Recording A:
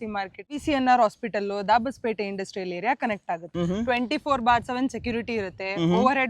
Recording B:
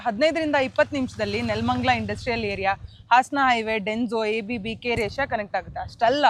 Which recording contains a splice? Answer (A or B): A